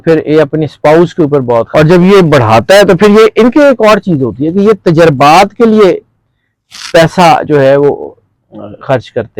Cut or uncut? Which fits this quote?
cut